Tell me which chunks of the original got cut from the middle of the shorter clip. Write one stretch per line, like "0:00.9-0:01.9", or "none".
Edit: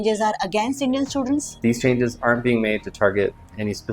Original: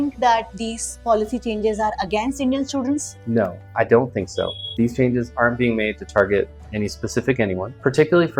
0:03.1-0:04.7